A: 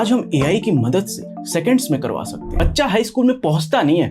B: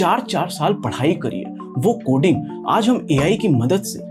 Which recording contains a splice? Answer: A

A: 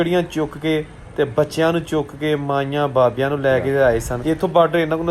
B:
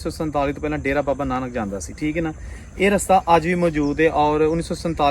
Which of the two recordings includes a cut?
A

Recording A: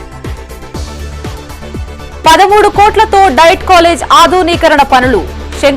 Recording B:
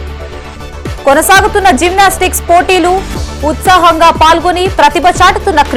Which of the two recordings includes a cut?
A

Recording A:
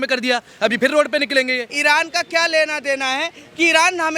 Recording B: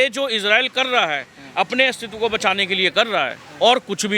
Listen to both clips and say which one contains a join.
A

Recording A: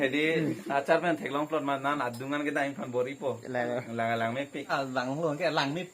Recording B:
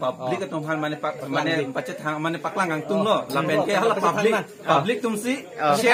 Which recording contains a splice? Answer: A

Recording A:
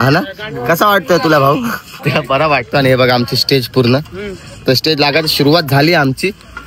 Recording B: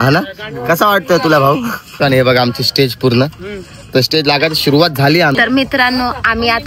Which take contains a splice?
B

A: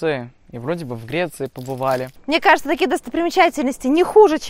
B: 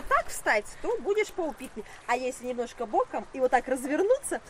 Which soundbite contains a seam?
A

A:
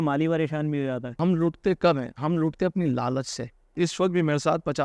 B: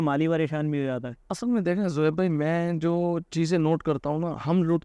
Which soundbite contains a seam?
A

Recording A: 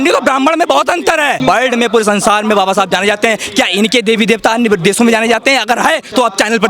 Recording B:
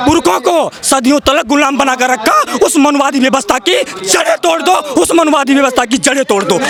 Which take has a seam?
A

